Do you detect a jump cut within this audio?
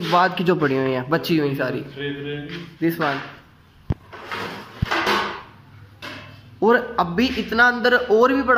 no; 0 cuts

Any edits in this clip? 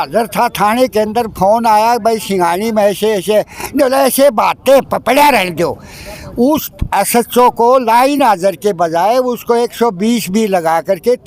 no; 0 cuts

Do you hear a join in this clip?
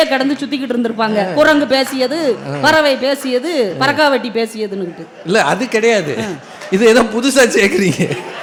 no; 0 cuts

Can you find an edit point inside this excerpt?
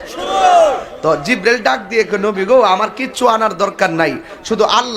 no; 0 cuts

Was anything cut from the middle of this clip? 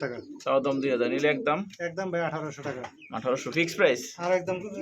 no; 0 cuts

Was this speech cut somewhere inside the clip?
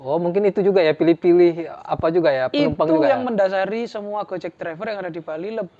no; 0 cuts

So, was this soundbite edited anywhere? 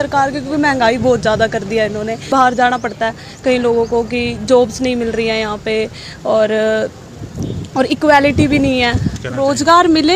yes; 2 cuts; at 2.3 s, 9.2 s

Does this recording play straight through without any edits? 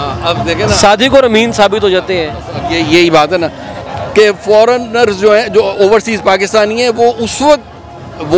no; 1 cut; at 3.8 s

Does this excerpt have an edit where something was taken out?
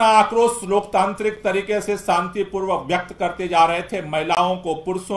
no; 0 cuts

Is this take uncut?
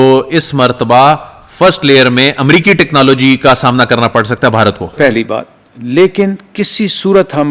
yes; 0 cuts

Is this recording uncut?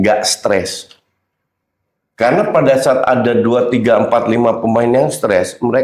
yes; 0 cuts

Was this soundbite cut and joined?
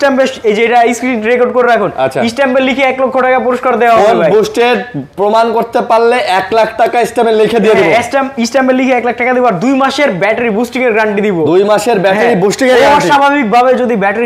no; 0 cuts

